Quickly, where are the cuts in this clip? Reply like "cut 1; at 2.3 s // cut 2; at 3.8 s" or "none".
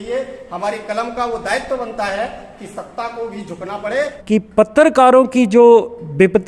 cut 1; at 4.1 s